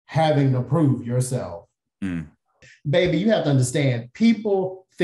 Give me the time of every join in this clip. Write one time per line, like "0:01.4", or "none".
0:02.6